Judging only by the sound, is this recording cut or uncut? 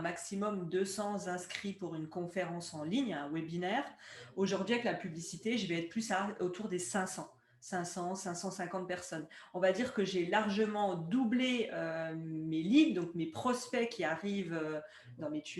uncut